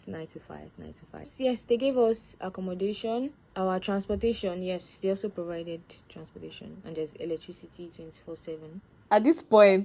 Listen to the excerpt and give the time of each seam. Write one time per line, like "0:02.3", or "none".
0:01.3
0:03.4
0:08.9